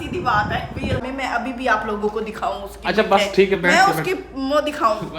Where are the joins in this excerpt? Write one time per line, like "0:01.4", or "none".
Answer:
0:01.0